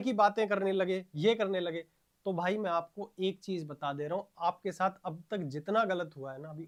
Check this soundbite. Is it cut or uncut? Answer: uncut